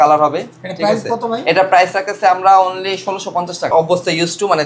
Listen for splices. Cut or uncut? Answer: cut